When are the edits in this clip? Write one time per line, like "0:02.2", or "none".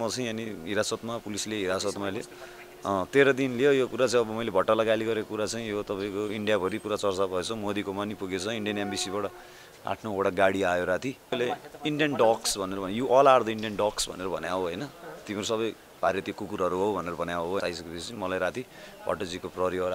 0:11.3
0:17.6

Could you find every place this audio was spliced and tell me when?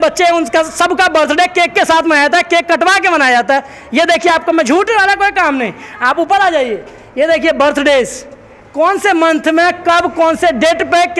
none

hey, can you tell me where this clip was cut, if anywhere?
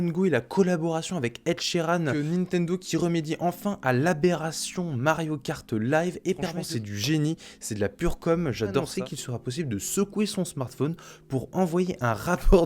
0:02.1
0:06.6
0:08.9

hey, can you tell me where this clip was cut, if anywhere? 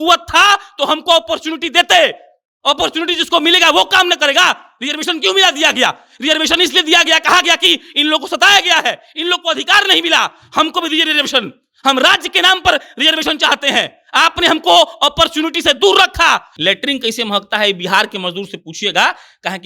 0:16.5

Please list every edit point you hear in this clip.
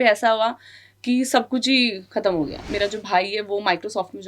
0:02.7

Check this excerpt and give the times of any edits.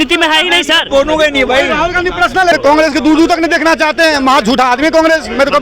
0:02.6

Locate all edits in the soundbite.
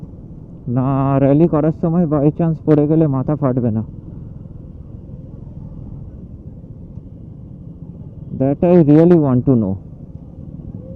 none

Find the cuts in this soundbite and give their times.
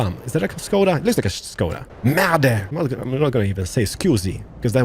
0:01.9
0:02.7

